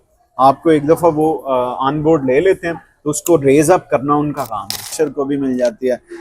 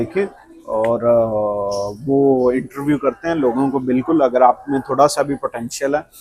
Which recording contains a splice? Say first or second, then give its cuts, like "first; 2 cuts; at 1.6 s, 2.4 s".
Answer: first; 1 cut; at 4.9 s